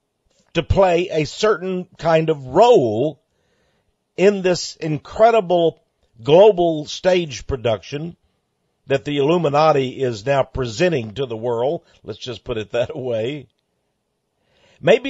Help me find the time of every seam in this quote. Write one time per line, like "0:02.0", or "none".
0:03.2